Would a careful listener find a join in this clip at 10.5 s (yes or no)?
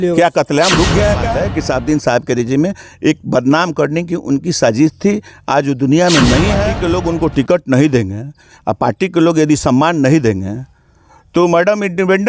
no